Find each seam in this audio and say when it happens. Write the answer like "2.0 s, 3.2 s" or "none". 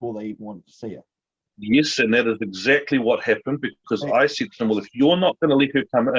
none